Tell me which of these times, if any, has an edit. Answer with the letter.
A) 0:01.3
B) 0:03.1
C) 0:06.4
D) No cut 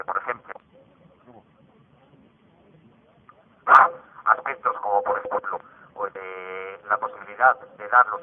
C